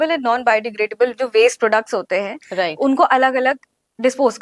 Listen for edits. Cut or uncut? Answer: uncut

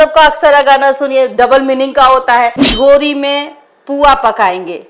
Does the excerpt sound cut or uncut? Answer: cut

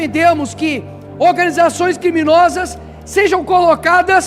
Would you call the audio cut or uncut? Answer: uncut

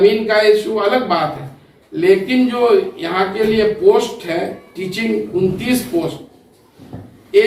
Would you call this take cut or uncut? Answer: uncut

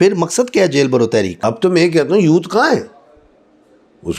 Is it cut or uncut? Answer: cut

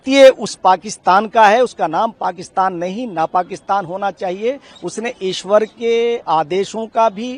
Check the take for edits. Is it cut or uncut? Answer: uncut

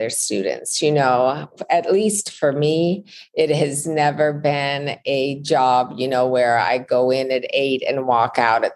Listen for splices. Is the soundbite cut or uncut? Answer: uncut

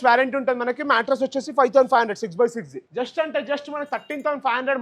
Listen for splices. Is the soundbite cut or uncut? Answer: cut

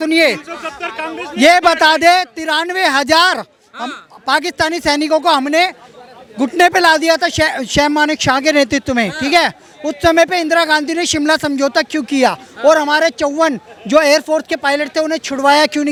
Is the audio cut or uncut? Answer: uncut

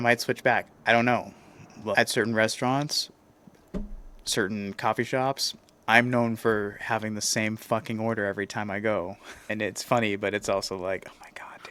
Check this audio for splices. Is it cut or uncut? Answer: uncut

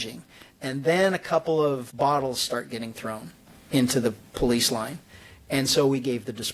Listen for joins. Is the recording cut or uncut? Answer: cut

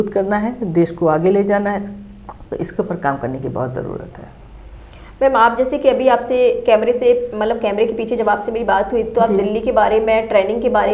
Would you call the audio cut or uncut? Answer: uncut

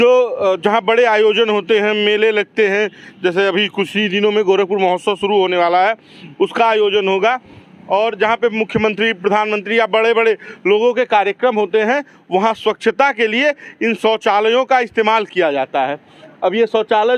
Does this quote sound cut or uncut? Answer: uncut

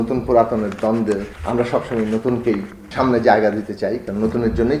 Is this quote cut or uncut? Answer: cut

